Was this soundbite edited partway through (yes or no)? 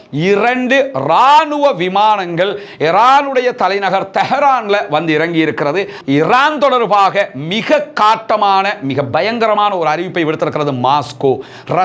yes